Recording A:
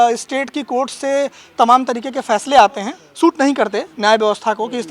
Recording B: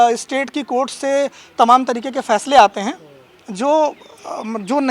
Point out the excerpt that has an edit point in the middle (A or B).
A